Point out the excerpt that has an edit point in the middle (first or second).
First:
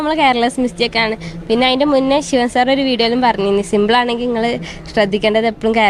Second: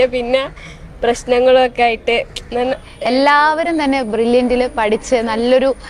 second